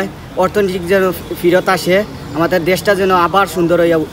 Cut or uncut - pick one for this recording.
uncut